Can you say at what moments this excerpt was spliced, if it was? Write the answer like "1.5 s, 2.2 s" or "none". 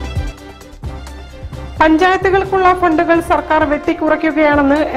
1.0 s